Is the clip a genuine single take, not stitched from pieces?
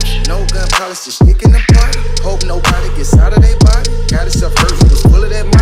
yes; 0 cuts

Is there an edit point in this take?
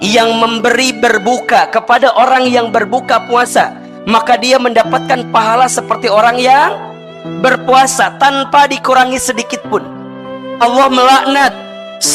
yes; 1 cut; at 10.4 s

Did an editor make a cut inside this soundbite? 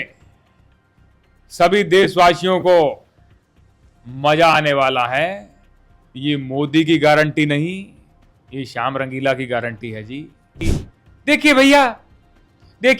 yes; 1 cut; at 10.6 s

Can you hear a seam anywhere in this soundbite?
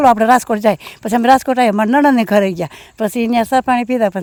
no; 0 cuts

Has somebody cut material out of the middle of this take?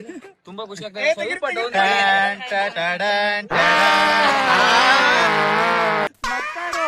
no; 0 cuts

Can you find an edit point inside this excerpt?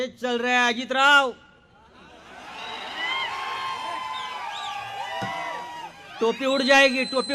no; 0 cuts

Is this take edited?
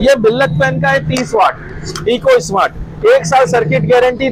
no; 0 cuts

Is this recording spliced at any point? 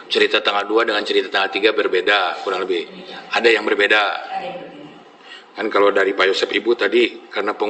no; 0 cuts

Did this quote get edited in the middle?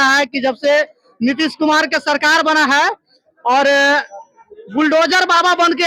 no; 0 cuts

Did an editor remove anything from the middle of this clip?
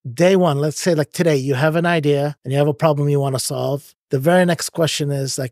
yes; 2 cuts; at 2.4 s, 3.9 s

